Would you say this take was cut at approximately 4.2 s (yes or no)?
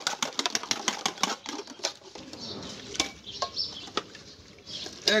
no